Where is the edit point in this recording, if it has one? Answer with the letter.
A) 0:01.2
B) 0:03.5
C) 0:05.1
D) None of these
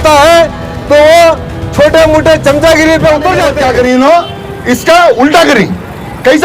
B